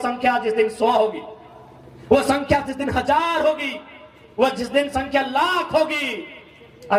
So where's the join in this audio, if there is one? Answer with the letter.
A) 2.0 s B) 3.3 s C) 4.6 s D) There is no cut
D